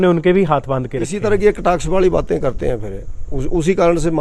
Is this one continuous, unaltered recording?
no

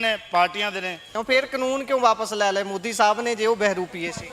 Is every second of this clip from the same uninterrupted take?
no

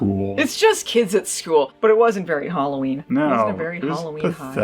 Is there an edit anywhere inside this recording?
yes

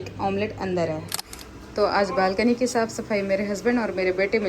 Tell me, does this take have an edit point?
yes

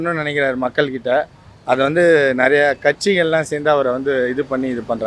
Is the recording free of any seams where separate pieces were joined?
yes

